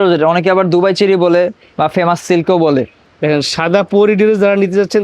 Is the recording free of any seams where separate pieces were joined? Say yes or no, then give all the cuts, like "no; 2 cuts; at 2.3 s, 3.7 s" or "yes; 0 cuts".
no; 1 cut; at 3.1 s